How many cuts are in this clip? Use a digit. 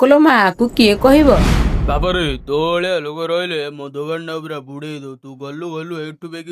1